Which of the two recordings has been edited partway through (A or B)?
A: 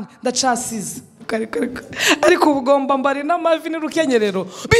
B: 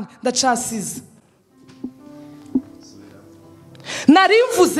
A